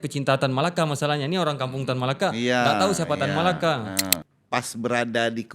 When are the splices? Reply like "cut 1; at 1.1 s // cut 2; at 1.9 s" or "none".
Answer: cut 1; at 4.2 s

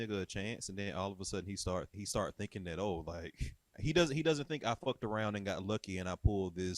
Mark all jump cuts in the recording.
cut 1; at 1.9 s // cut 2; at 3.8 s

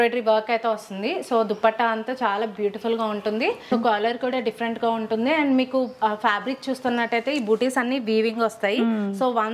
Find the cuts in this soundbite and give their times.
cut 1; at 3.7 s

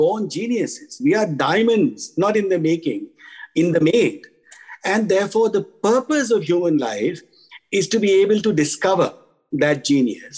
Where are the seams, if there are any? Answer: cut 1; at 1.0 s

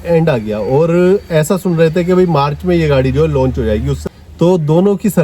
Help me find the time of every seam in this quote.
cut 1; at 3.9 s

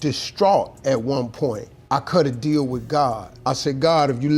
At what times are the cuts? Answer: cut 1; at 1.7 s

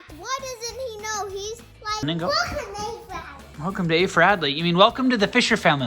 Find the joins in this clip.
cut 1; at 2.0 s

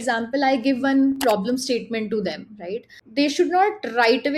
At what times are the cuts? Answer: cut 1; at 3.0 s

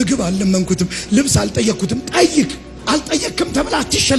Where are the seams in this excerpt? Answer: cut 1; at 2.7 s

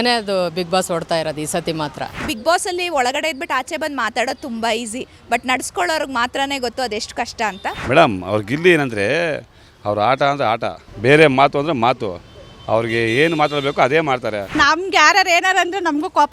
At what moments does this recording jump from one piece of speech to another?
cut 1; at 2.3 s // cut 2; at 7.8 s // cut 3; at 10.8 s // cut 4; at 14.6 s

